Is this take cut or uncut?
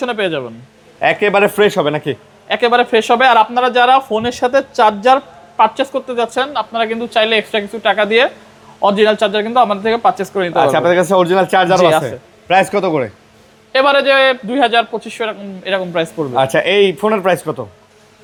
uncut